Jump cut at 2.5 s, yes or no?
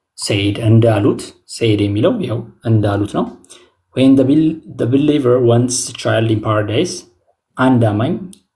no